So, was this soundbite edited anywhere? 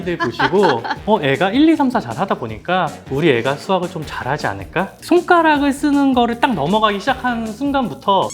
yes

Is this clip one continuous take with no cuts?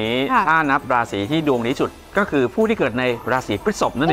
yes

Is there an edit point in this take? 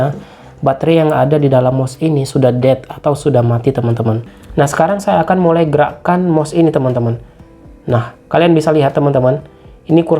yes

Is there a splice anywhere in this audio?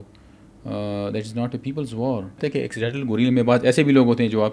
yes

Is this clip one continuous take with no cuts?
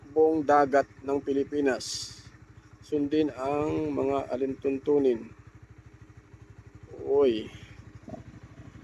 yes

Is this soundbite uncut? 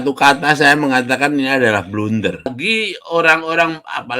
no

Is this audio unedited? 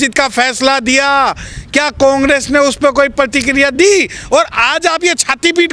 yes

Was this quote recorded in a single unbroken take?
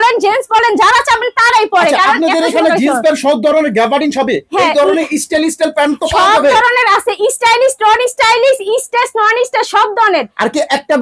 yes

